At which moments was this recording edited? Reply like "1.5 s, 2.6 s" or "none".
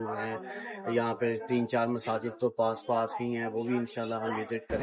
none